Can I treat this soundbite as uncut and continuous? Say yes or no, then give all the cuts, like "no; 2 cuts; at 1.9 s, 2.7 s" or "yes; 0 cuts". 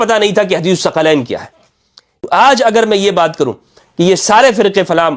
no; 1 cut; at 2.2 s